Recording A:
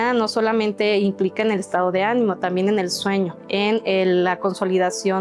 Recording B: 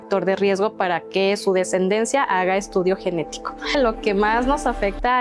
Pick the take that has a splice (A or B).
B